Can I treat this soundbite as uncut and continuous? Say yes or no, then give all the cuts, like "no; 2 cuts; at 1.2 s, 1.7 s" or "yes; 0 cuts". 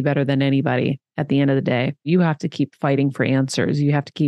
no; 1 cut; at 2.1 s